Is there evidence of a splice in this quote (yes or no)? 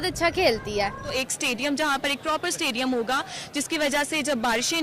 yes